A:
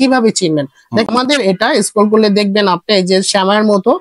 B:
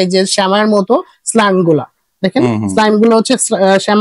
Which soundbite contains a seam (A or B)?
A